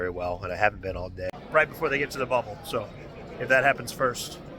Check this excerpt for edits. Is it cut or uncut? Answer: cut